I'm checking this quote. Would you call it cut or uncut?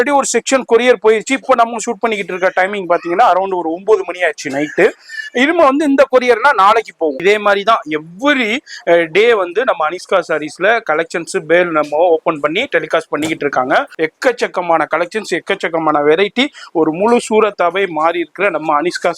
cut